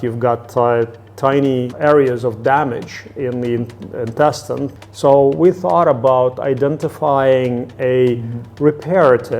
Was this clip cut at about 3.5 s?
no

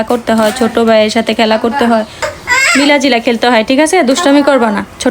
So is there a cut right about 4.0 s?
no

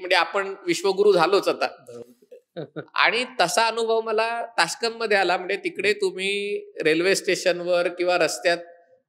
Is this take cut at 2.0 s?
no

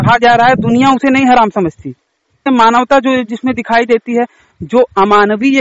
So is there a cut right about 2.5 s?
yes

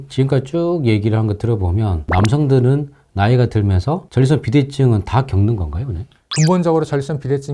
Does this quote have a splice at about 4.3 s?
no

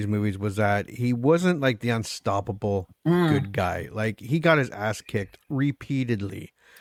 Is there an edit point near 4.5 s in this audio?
no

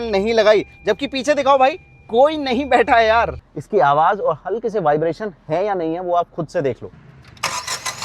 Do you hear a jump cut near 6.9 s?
yes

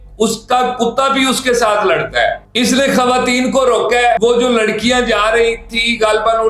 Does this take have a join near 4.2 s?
yes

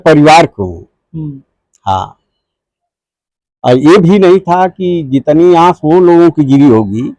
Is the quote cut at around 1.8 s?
no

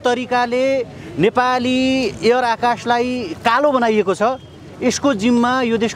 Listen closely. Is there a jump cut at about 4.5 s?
no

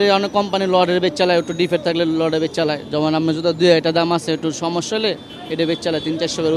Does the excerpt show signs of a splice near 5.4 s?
no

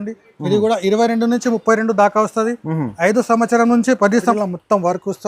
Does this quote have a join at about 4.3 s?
yes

